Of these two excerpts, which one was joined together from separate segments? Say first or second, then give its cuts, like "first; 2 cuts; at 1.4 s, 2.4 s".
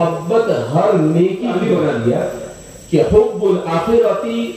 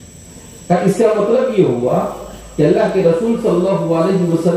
first; 1 cut; at 1.5 s